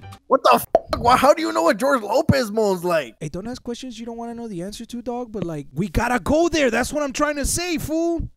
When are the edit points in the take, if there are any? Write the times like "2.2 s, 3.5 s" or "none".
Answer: 5.7 s

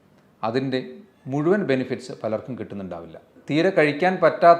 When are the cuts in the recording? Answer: 3.3 s

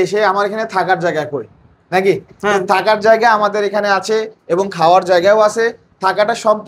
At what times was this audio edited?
none

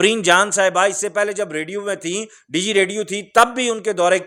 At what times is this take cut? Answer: none

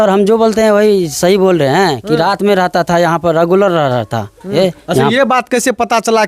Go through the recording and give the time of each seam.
4.5 s

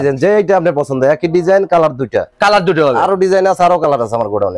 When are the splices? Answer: none

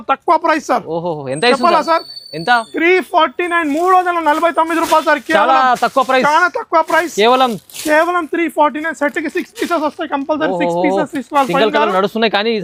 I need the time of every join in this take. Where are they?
none

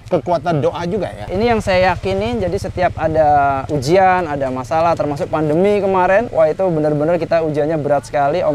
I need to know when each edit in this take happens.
1.3 s, 3.6 s, 6.3 s

